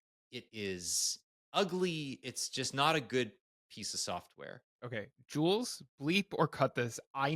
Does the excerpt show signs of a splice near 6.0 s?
no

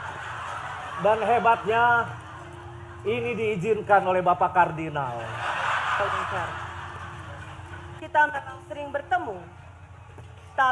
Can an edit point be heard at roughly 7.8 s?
yes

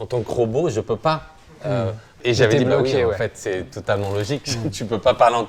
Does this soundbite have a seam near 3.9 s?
no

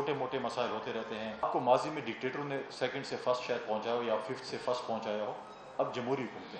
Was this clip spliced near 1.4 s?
yes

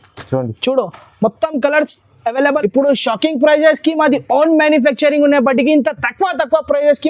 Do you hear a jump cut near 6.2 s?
no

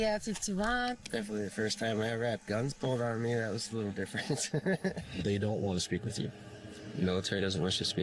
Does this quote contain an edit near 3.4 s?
no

